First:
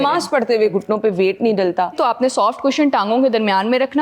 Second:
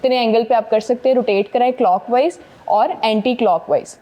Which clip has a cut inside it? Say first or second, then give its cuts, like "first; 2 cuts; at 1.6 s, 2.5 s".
first; 2 cuts; at 0.7 s, 2.0 s